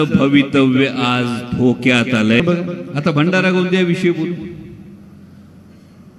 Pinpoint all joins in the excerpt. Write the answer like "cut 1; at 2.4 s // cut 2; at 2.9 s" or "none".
cut 1; at 2.4 s